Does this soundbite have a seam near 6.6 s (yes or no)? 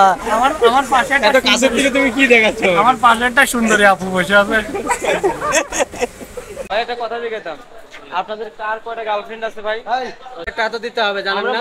yes